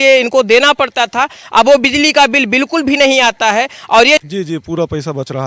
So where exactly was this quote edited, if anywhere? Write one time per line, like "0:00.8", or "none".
0:04.2